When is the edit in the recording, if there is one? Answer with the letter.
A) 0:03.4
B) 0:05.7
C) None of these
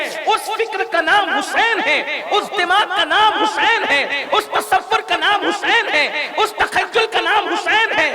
C